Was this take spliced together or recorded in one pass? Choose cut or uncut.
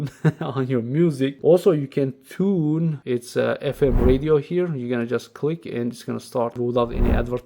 cut